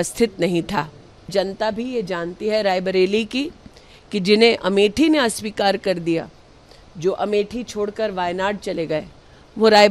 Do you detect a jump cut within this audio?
yes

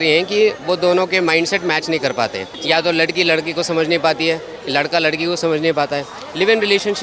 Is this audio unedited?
yes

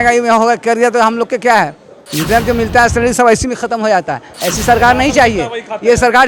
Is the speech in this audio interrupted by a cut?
no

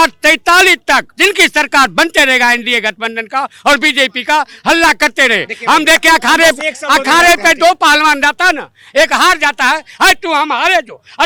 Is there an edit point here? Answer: no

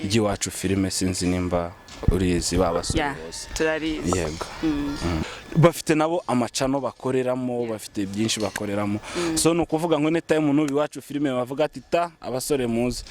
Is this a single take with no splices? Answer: no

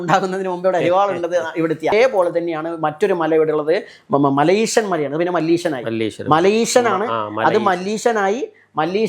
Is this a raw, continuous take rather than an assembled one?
no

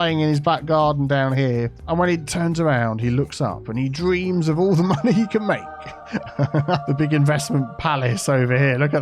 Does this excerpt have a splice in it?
yes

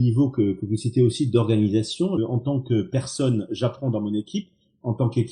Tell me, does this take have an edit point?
yes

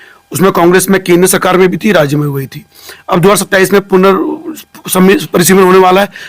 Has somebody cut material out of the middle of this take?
no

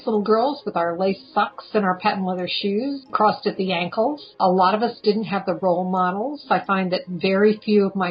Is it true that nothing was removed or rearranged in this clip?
no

